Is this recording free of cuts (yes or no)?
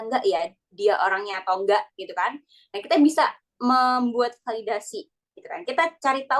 yes